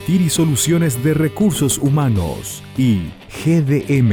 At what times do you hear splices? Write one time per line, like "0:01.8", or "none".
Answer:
none

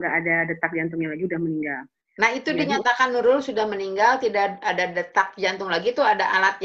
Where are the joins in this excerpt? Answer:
none

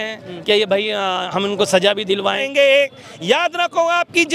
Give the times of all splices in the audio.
0:02.4

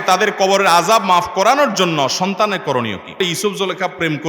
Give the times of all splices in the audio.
0:03.2

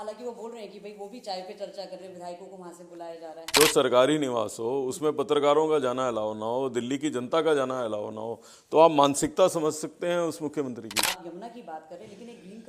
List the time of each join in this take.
0:03.5
0:11.0

